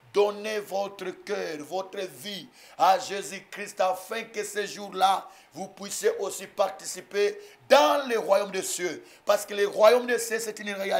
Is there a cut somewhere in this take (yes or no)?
no